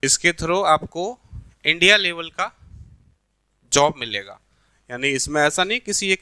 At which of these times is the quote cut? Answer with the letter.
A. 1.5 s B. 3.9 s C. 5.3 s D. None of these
D